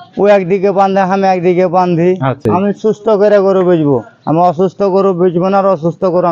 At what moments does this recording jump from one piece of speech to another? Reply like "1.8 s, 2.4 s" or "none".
2.4 s